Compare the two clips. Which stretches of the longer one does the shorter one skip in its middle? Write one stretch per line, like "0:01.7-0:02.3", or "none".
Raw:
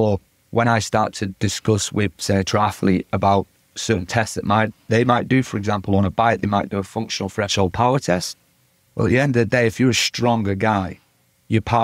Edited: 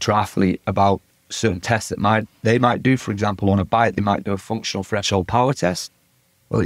none